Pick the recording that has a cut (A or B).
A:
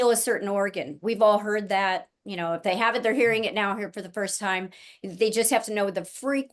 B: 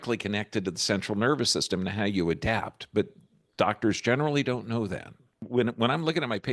B